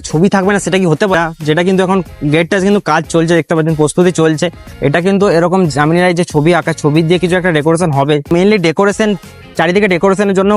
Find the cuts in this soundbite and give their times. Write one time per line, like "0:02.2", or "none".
0:01.1
0:08.3